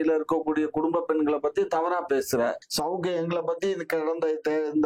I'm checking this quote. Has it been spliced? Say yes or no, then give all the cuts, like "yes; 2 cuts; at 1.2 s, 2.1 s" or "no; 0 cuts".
yes; 1 cut; at 2.7 s